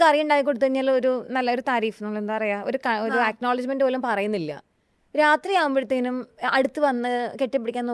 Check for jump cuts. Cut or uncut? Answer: uncut